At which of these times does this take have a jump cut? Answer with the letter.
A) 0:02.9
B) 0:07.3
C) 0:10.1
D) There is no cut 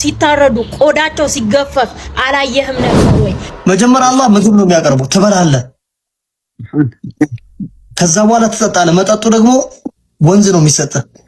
A